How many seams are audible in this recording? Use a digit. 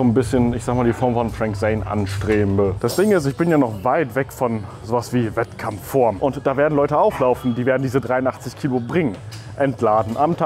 2